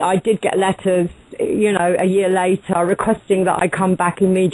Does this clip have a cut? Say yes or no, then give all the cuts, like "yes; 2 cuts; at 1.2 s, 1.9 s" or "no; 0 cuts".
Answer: yes; 1 cut; at 1.2 s